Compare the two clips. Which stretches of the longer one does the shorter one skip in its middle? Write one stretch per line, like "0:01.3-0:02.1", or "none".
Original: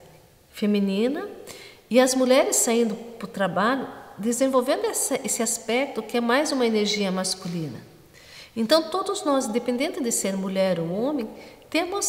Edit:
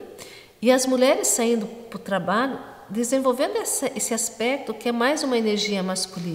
none